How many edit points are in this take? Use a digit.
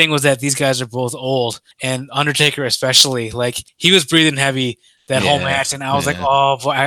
2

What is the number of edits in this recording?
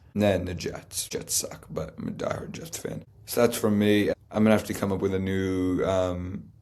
3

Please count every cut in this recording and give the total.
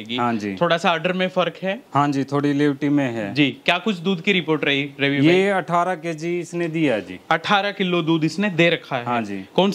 0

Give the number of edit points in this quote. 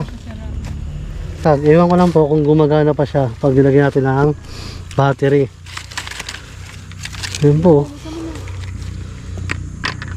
1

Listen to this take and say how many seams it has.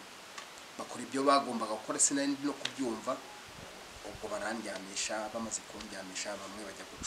0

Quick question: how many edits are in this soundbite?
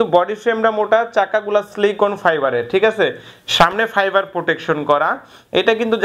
0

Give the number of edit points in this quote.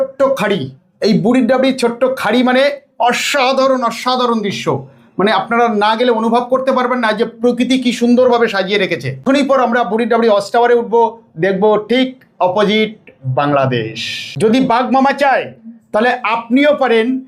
2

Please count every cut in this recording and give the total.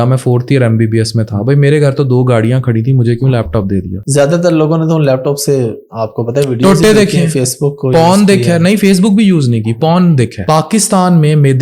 2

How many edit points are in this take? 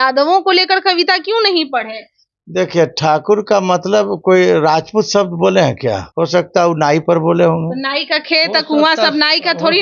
1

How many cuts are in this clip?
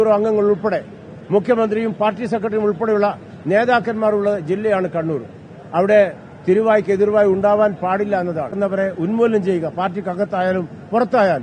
1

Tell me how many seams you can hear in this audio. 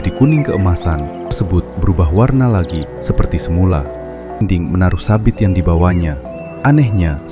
2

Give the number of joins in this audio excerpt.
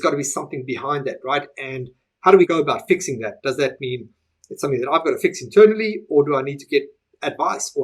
1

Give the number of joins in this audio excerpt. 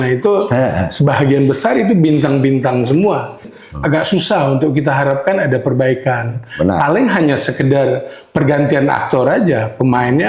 1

